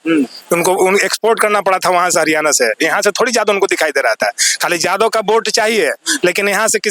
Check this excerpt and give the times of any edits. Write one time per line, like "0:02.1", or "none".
none